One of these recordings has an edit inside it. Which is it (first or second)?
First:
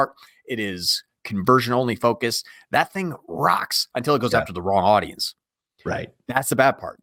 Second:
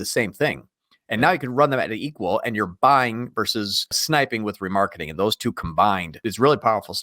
second